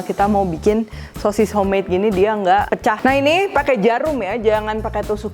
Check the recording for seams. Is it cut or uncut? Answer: cut